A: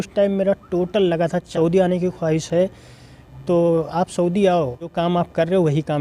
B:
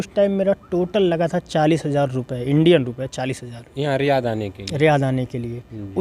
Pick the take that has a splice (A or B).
A